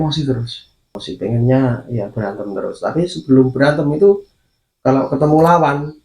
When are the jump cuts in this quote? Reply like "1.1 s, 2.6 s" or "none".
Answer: 1.0 s

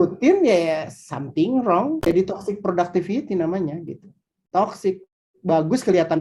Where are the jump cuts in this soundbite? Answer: 2.0 s

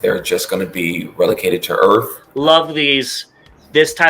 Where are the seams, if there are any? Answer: 2.2 s

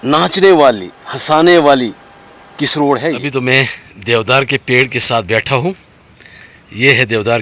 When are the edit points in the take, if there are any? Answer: 3.2 s

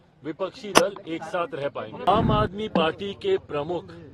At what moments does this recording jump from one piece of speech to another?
2.1 s

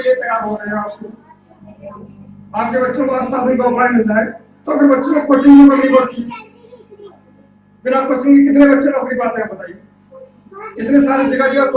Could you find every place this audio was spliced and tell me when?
none

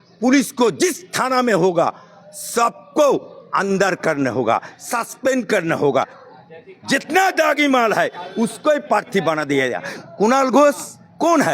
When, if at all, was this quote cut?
5.9 s

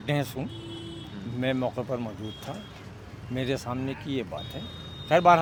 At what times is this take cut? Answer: none

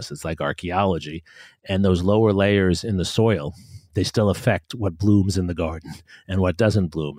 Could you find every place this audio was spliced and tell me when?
none

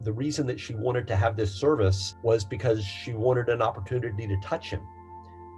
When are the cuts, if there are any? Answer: 2.1 s

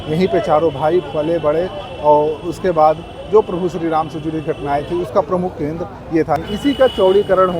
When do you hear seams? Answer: 6.4 s

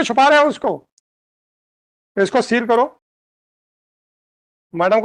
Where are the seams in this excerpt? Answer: none

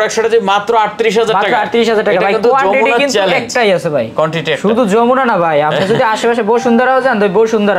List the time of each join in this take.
none

